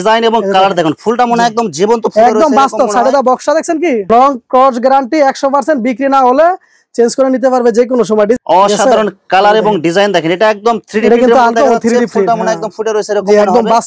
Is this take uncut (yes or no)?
no